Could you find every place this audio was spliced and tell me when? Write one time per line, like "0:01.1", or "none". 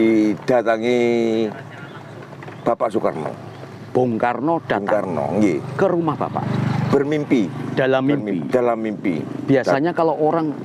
none